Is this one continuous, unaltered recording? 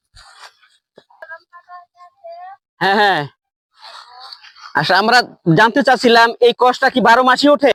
yes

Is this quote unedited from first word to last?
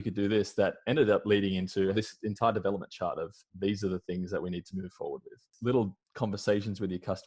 no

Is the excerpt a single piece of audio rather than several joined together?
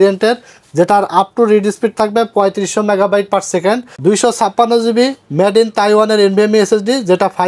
no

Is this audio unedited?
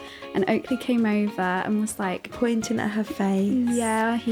yes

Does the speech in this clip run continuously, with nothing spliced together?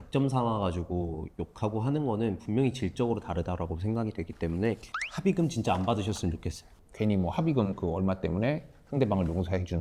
yes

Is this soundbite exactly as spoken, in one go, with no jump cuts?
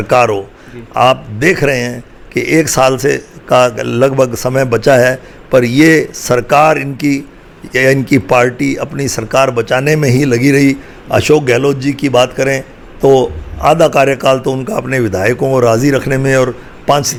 yes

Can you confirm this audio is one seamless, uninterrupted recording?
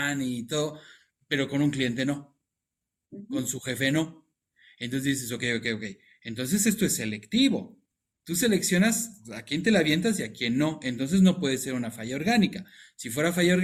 yes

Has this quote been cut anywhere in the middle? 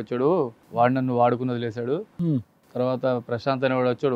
no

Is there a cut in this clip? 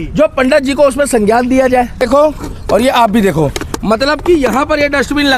yes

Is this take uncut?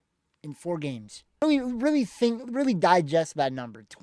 no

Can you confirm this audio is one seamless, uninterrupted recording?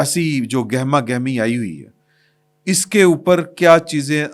yes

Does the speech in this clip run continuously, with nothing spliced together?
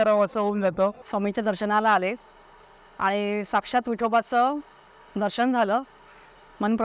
no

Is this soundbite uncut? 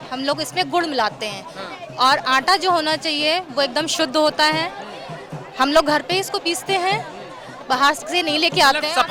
yes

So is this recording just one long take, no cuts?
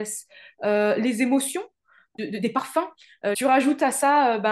no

